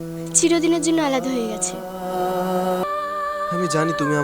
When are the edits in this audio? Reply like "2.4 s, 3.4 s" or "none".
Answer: 2.8 s